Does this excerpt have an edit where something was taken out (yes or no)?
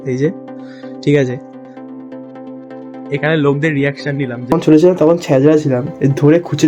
yes